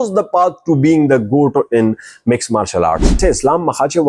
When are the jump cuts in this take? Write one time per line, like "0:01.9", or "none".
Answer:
0:03.2